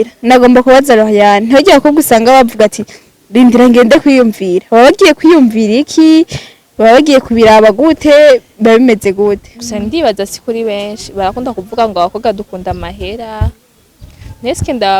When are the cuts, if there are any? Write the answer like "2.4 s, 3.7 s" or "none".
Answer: 9.6 s

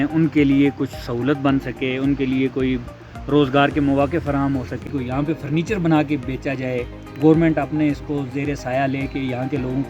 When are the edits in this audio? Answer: 5.0 s

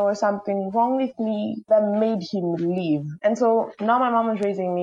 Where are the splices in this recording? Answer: 3.1 s

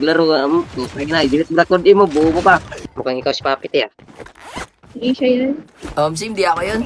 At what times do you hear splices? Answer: 2.7 s

